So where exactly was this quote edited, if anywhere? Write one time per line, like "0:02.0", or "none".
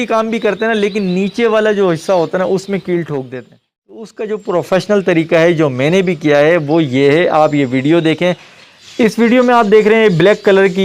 0:04.1